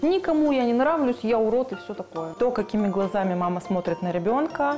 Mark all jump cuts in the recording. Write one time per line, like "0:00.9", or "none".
0:02.3